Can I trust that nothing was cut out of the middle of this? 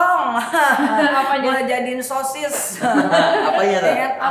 yes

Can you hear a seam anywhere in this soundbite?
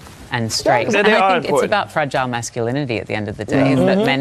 yes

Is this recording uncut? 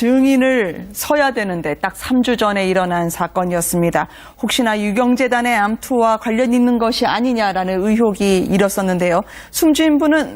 no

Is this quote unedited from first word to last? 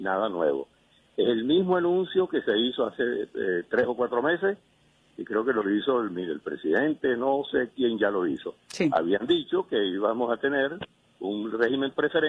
no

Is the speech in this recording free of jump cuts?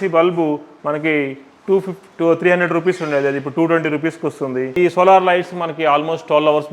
no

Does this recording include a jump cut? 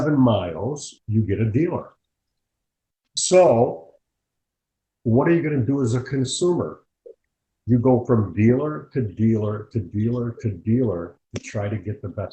no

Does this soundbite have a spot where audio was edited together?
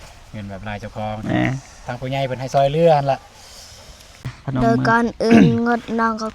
yes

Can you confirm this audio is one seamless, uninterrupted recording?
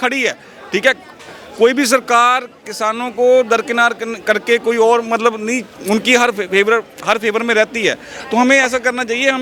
yes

